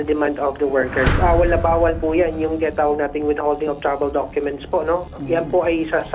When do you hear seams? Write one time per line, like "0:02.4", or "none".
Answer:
0:01.0
0:05.0